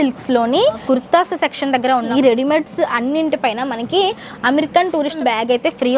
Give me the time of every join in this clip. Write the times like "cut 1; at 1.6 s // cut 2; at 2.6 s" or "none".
cut 1; at 0.8 s // cut 2; at 2.1 s // cut 3; at 5.2 s